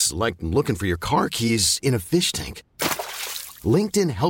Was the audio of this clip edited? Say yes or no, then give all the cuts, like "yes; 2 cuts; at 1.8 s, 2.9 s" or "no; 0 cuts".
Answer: no; 0 cuts